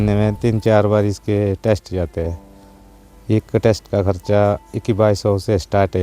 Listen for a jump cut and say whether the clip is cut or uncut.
uncut